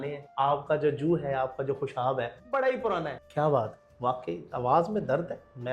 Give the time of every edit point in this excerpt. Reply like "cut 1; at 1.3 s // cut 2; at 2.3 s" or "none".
cut 1; at 3.2 s

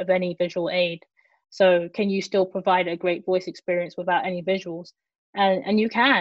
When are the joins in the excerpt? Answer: none

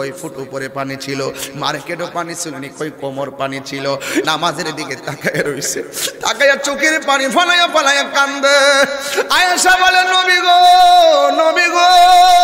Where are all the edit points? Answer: cut 1; at 4.2 s

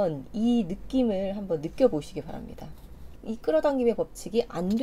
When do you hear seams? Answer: cut 1; at 3.1 s

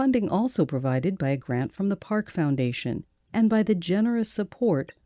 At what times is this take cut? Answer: cut 1; at 3.1 s

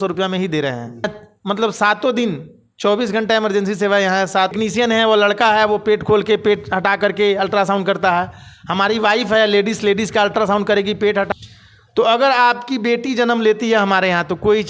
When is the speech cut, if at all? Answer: cut 1; at 1.3 s // cut 2; at 4.5 s // cut 3; at 11.3 s

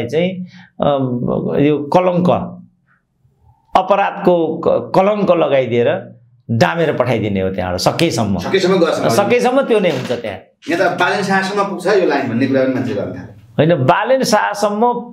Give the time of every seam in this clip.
none

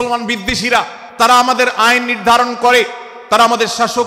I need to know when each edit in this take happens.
cut 1; at 1.0 s

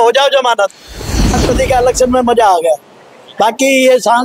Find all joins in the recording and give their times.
cut 1; at 1.4 s

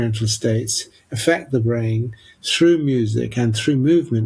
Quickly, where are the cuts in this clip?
none

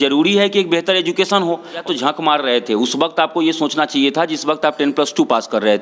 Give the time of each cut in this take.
cut 1; at 1.8 s

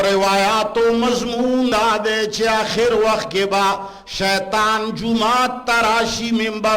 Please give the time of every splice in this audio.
cut 1; at 1.9 s

